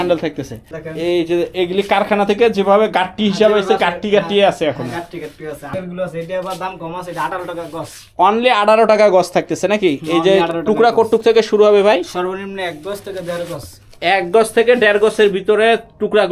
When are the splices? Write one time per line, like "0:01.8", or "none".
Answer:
0:05.7